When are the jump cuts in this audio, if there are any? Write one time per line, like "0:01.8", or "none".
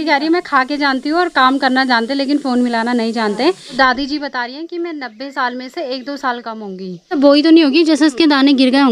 0:03.8
0:07.1